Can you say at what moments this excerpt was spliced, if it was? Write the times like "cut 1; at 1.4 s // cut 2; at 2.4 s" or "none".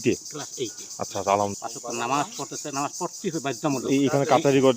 cut 1; at 1.6 s